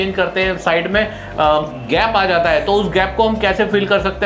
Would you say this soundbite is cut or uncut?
uncut